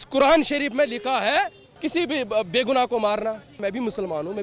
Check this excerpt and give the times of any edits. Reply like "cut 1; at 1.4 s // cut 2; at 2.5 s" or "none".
cut 1; at 1.6 s // cut 2; at 3.6 s